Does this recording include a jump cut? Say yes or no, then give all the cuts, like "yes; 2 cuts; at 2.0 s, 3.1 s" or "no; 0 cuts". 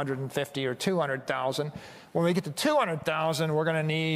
no; 0 cuts